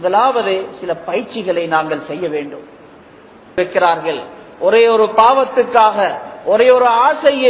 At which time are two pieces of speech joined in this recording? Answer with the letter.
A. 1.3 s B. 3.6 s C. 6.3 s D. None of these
B